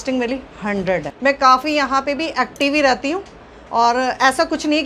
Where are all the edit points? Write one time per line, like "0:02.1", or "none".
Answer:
0:01.1